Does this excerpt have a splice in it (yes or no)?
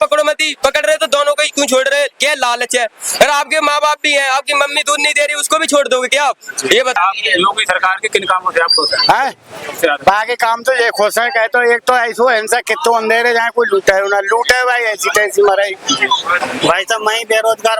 yes